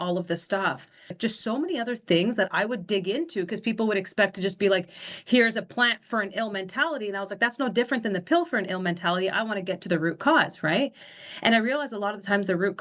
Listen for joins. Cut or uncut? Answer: cut